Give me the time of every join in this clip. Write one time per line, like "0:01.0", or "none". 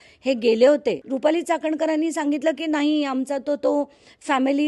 0:01.1